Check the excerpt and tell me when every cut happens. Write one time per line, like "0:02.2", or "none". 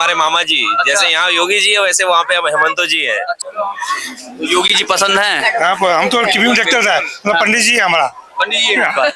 0:03.4

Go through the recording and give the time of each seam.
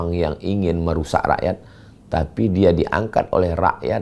none

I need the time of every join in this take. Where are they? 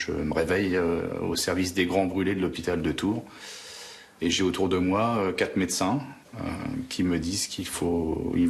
none

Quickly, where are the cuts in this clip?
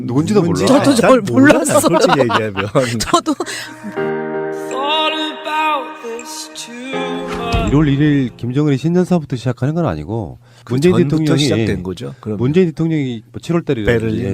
0:03.3

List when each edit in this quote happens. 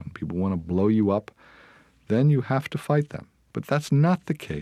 0:03.5

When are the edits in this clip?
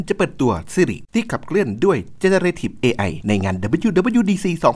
0:01.0
0:03.1

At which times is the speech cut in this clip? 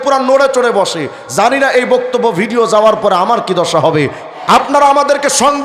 0:04.3

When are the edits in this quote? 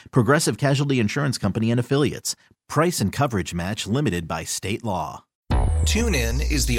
0:05.3

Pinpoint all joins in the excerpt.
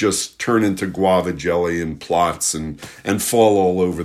none

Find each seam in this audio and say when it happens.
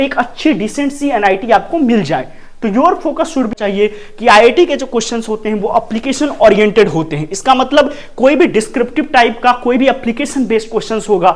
0:03.5

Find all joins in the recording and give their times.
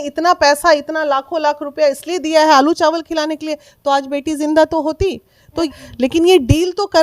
0:05.7

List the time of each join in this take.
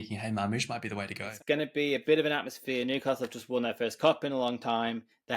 0:01.2

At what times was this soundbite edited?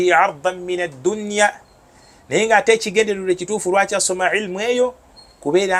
none

